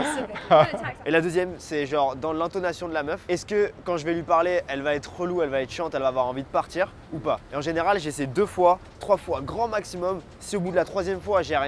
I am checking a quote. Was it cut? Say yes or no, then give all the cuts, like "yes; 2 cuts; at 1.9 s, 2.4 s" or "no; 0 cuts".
yes; 4 cuts; at 1.0 s, 3.2 s, 7.3 s, 10.3 s